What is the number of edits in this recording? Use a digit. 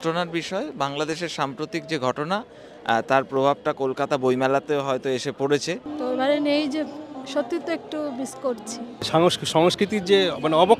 2